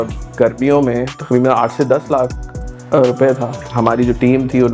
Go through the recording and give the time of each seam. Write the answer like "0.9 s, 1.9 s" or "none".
3.5 s